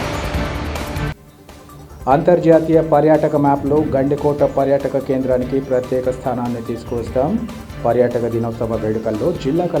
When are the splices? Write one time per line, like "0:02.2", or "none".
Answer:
0:01.1

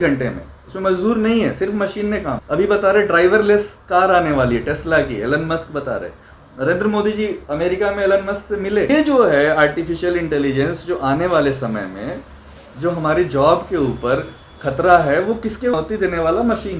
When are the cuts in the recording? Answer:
0:02.4
0:08.9
0:15.7

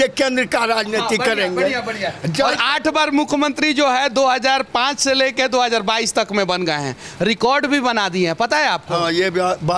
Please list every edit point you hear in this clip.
none

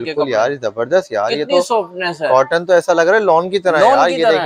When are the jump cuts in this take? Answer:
none

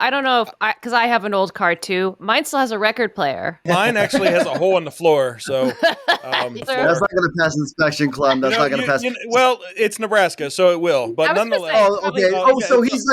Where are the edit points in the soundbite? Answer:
0:03.6
0:06.6

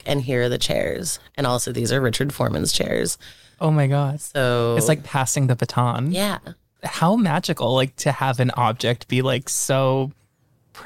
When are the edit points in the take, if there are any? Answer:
0:06.7

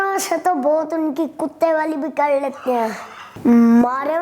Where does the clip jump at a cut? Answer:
0:03.1

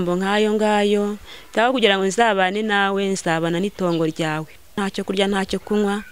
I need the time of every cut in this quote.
0:04.8

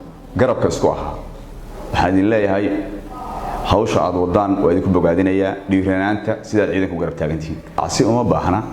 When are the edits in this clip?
0:07.8

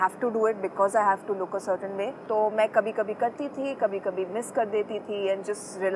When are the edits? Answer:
none

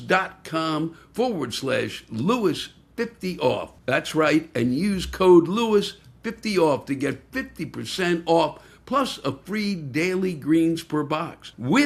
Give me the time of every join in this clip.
none

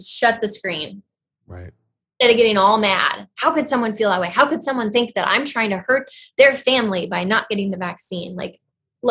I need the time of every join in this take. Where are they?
none

